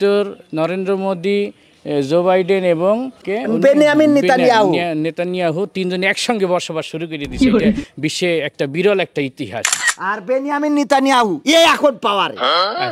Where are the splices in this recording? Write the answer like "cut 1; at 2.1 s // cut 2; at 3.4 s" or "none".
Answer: cut 1; at 3.2 s // cut 2; at 7.2 s // cut 3; at 8.1 s // cut 4; at 9.9 s